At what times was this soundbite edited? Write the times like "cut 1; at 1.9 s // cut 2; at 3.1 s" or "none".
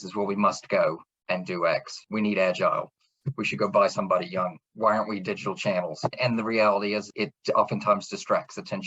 cut 1; at 6.2 s // cut 2; at 7.1 s